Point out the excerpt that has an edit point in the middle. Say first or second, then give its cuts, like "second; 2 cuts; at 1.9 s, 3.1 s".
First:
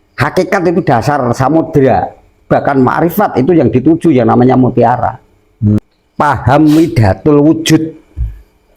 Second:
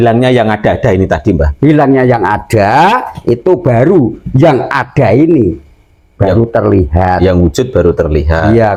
first; 1 cut; at 5.8 s